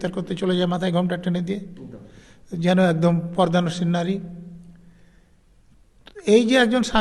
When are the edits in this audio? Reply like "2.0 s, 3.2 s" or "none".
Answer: none